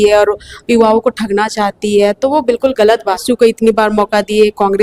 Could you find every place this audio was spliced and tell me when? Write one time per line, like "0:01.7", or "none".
0:03.2